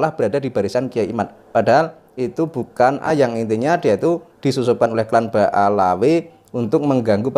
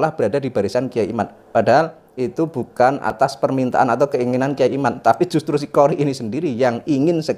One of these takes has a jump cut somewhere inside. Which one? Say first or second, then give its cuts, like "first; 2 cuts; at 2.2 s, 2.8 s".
first; 1 cut; at 3.1 s